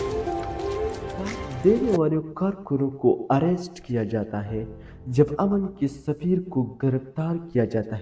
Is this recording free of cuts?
no; 1 cut; at 1.5 s

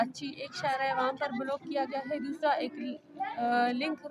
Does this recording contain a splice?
no; 0 cuts

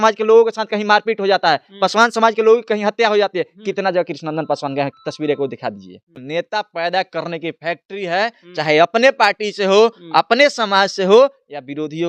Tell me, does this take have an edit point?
yes; 1 cut; at 6.1 s

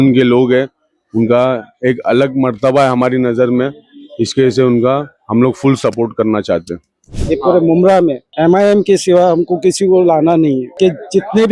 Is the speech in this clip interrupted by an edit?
yes; 3 cuts; at 7.1 s, 8.2 s, 10.7 s

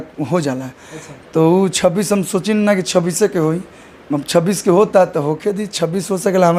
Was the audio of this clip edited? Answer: no; 0 cuts

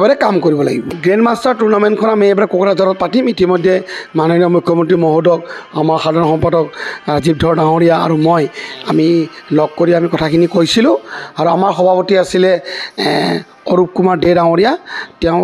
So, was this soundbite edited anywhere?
yes; 1 cut; at 1.0 s

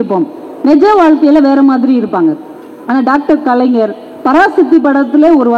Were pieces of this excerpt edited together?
no; 0 cuts

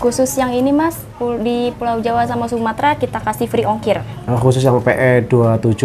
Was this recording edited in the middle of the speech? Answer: no; 0 cuts

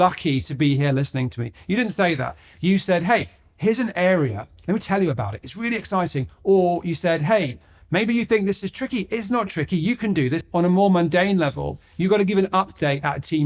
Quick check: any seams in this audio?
no; 0 cuts

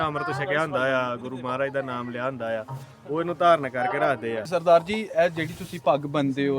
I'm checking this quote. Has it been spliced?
yes; 1 cut; at 4.4 s

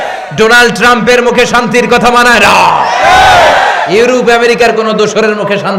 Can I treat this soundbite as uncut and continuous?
yes; 0 cuts

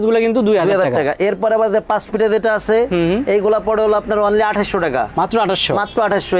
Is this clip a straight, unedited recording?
yes; 0 cuts

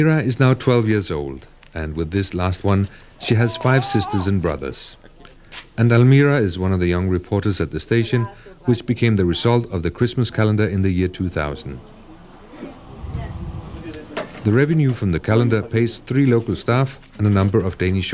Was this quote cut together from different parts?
no; 0 cuts

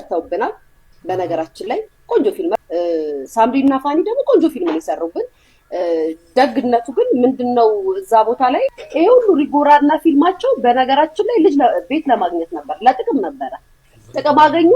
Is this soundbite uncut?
no; 2 cuts; at 2.5 s, 8.8 s

